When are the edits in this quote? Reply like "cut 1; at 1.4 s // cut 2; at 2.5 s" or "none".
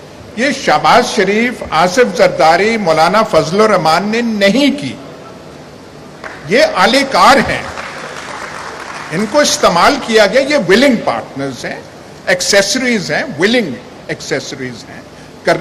none